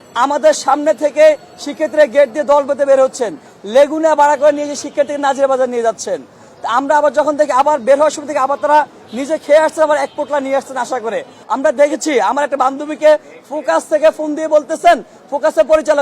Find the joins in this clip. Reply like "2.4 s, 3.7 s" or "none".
11.4 s